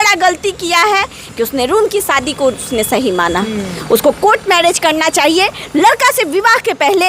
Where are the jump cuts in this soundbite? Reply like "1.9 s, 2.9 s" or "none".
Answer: none

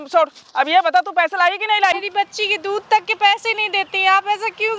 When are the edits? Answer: 2.0 s

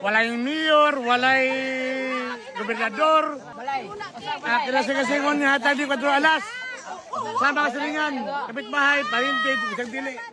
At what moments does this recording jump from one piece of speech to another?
3.5 s

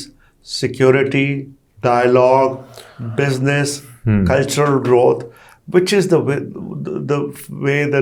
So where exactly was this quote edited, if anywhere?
none

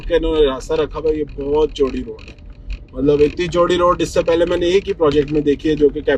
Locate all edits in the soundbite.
none

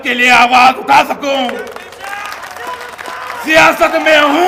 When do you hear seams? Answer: none

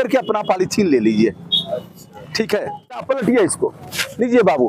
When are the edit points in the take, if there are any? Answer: 3.0 s

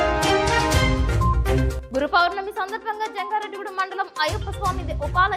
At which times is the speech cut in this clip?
1.7 s

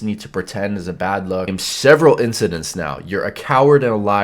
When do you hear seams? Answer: 1.6 s

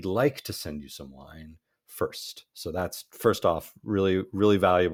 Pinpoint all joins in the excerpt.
none

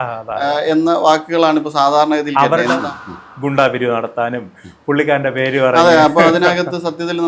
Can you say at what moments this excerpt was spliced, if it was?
2.8 s

